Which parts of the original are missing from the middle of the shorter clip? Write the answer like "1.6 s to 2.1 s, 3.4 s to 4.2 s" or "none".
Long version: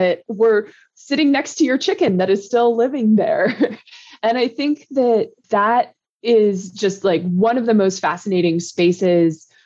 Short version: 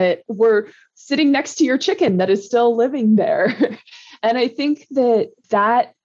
none

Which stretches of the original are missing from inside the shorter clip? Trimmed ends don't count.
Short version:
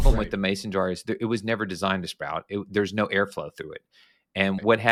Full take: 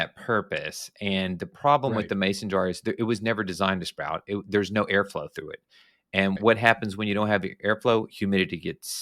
none

